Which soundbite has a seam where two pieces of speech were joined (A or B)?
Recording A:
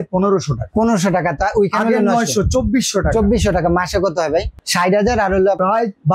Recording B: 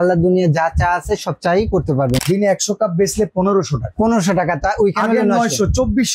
B